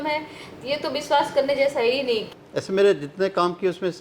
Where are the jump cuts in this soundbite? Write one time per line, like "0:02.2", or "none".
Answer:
0:02.3